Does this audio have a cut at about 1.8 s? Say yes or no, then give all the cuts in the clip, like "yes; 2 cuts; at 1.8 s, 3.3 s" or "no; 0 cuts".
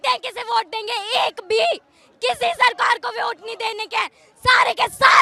no; 0 cuts